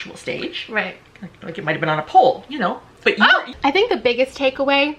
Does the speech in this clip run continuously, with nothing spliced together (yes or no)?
no